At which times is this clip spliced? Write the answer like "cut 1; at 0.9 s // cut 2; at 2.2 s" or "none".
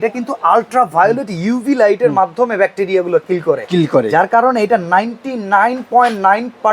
none